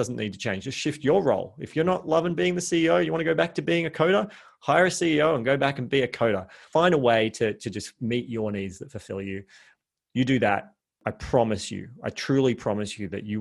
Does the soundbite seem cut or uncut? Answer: cut